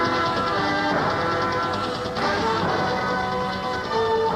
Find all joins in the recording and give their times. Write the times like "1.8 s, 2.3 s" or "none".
none

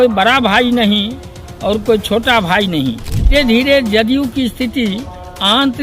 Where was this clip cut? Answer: 3.3 s

